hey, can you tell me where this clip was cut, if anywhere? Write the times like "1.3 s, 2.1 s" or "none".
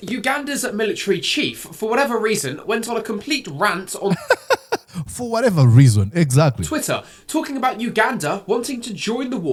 none